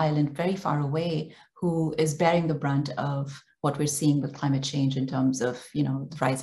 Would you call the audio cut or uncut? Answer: uncut